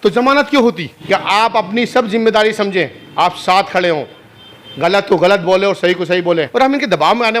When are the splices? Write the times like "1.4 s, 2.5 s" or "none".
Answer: 0.9 s, 6.5 s